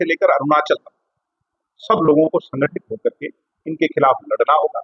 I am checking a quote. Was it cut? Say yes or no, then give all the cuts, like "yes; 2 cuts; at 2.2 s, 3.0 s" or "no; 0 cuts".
no; 0 cuts